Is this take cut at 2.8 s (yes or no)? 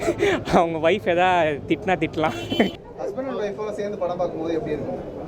yes